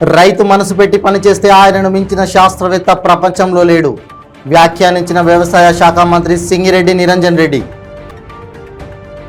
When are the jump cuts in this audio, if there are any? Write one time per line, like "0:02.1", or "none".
none